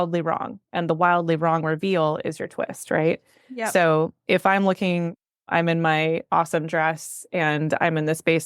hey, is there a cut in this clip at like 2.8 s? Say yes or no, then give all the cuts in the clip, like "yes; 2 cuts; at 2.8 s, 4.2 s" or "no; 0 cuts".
no; 0 cuts